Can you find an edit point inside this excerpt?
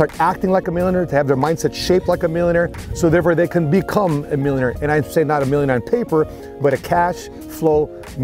no; 0 cuts

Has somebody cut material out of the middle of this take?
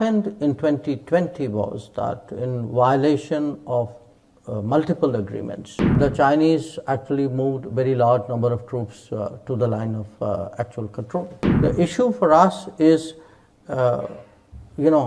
yes; 2 cuts; at 5.9 s, 11.4 s

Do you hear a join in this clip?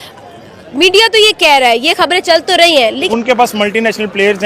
yes; 1 cut; at 3.0 s

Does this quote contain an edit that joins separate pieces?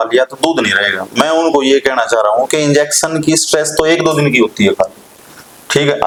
no; 0 cuts

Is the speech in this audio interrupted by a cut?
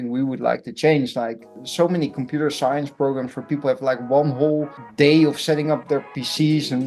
yes; 1 cut; at 1.6 s

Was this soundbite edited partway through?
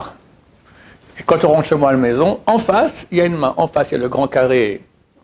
no; 0 cuts

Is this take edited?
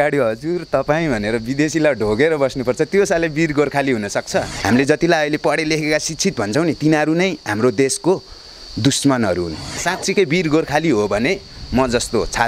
yes; 2 cuts; at 4.5 s, 9.8 s

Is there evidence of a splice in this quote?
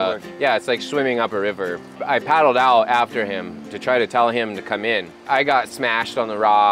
yes; 2 cuts; at 2.0 s, 5.2 s

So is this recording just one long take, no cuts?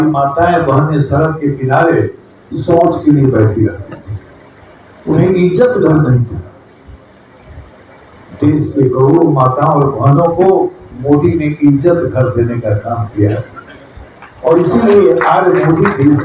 yes; 0 cuts

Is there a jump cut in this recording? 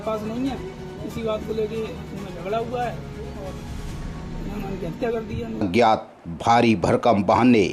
yes; 1 cut; at 5.6 s

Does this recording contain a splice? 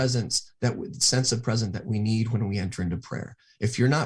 no; 0 cuts

